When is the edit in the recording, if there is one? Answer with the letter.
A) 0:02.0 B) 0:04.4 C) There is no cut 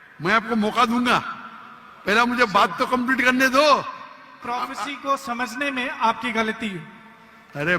B